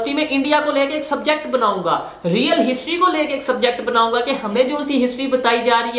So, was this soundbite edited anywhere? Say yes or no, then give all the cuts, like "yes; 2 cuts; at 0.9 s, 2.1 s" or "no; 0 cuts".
no; 0 cuts